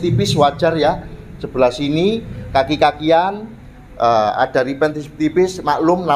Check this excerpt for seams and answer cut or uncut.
uncut